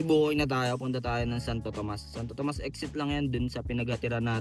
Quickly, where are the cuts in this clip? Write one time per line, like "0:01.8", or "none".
none

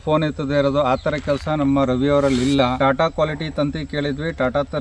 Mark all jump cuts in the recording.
0:02.8

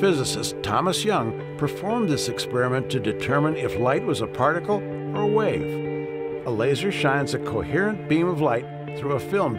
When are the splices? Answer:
none

